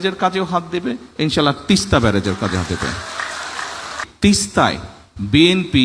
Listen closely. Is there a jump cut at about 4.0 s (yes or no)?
yes